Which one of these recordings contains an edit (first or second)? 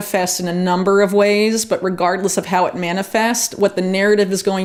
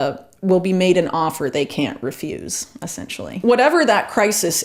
second